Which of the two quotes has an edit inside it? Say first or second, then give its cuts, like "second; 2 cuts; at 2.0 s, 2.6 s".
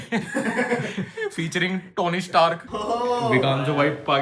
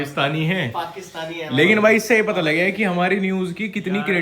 first; 1 cut; at 2.7 s